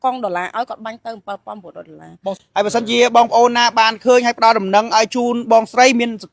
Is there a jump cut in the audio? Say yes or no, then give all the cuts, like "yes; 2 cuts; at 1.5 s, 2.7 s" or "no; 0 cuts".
yes; 1 cut; at 2.4 s